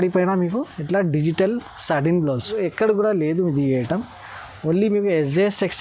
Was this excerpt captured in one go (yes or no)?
no